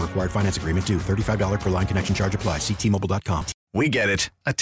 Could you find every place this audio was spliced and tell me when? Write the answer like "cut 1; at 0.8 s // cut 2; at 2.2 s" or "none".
cut 1; at 3.6 s